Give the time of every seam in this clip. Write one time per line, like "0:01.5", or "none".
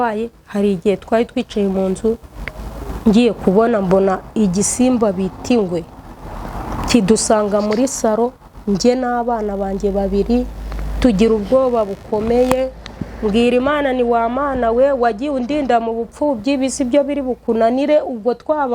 none

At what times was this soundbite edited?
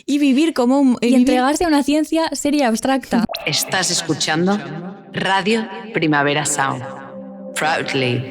0:03.3

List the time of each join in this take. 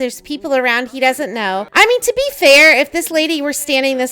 0:01.7

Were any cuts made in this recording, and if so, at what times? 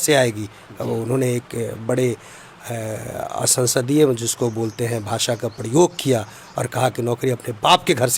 none

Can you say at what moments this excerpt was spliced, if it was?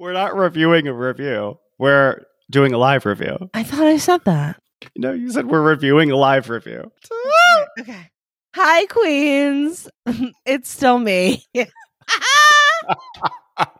none

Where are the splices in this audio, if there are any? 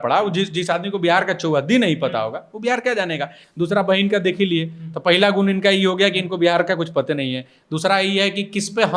none

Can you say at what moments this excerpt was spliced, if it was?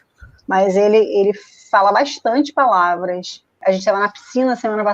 0:03.6

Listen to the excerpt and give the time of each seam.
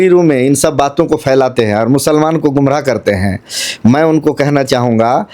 none

